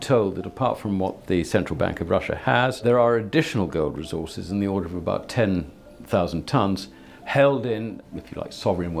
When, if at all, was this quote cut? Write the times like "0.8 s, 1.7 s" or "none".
2.8 s, 8.0 s